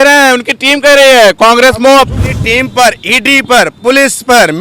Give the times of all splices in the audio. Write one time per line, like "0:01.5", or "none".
0:02.3